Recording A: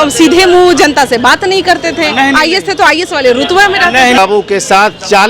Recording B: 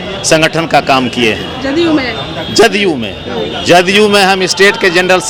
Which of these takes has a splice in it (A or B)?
A